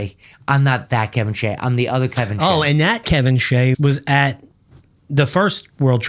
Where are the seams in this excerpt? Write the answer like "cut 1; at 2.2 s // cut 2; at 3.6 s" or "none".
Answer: cut 1; at 3.8 s